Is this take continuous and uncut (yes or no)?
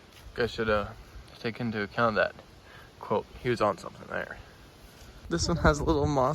no